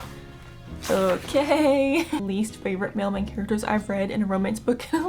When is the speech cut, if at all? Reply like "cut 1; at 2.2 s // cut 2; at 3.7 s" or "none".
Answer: cut 1; at 2.2 s